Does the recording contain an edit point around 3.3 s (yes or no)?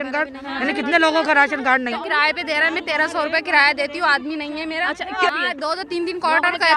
no